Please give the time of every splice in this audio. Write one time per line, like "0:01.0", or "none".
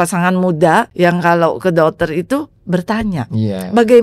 0:00.9

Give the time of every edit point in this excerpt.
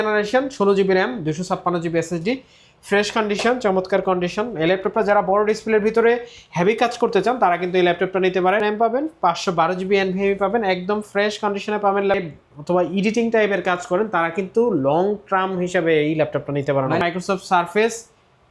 0:08.6
0:12.2
0:17.0

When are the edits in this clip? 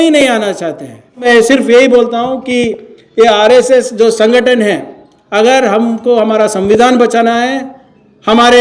0:01.2

